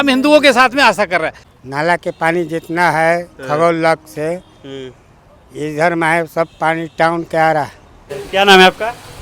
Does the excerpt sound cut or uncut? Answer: uncut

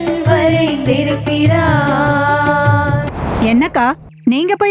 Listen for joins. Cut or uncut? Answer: cut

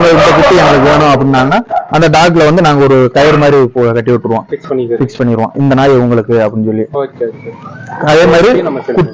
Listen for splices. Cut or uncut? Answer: uncut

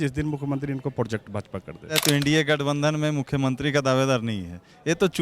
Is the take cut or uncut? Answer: cut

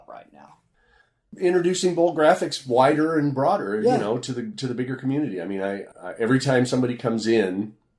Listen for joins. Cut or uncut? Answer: cut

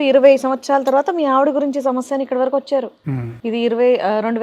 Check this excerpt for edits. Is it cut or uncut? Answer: uncut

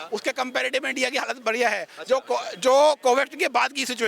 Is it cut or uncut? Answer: uncut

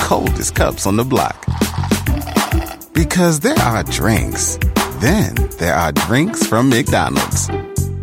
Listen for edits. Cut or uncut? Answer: uncut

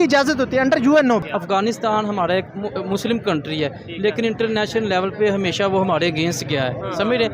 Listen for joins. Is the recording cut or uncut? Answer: cut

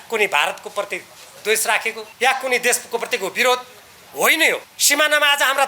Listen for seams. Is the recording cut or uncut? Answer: cut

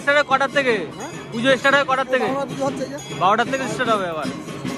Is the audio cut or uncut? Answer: uncut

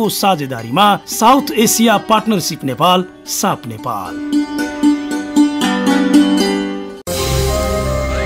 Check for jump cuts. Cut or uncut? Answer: cut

